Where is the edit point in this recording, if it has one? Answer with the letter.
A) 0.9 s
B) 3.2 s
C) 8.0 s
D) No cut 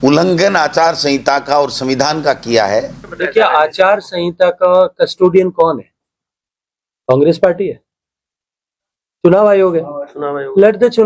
B